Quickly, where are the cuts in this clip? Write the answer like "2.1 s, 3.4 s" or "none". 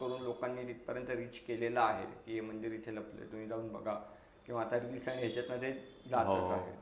none